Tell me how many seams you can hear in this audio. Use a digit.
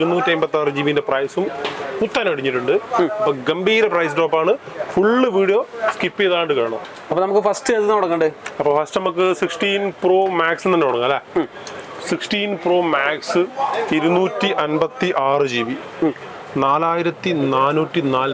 0